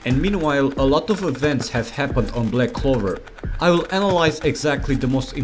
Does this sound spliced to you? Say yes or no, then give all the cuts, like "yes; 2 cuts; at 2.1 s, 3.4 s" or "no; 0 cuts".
no; 0 cuts